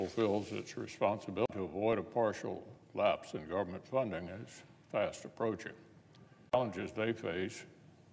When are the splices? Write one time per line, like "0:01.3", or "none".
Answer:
none